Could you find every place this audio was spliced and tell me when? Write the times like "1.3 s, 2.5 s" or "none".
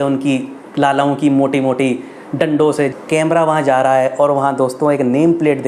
2.9 s